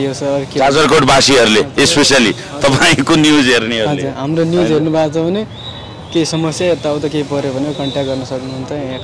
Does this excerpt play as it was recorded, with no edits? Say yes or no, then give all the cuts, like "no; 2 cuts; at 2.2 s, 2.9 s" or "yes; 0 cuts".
yes; 0 cuts